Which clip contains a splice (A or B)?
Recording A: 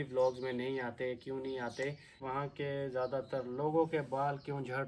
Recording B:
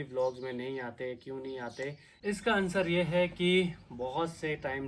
A